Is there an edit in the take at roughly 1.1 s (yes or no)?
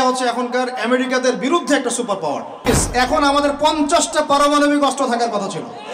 no